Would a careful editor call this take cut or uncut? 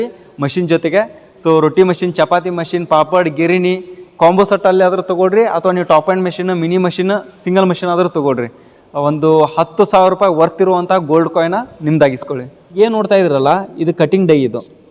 uncut